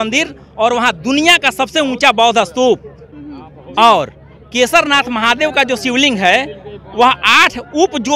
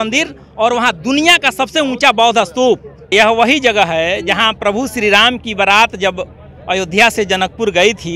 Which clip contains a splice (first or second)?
second